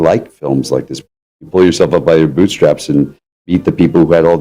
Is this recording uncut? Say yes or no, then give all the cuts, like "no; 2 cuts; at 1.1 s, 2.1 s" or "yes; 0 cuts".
no; 2 cuts; at 1.2 s, 3.5 s